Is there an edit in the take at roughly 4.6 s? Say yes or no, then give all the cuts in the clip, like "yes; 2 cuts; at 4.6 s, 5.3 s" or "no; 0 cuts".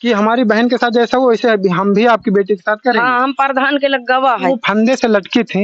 yes; 1 cut; at 4.6 s